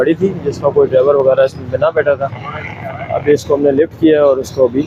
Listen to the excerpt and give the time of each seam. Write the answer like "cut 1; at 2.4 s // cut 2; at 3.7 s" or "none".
none